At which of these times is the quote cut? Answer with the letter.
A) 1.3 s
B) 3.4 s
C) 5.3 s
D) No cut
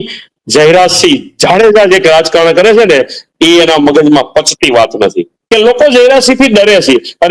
C